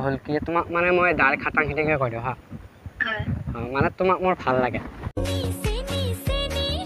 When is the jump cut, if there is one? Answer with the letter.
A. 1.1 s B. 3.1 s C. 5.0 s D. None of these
C